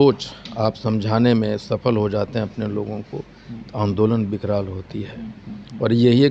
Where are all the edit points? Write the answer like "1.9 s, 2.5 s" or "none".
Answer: none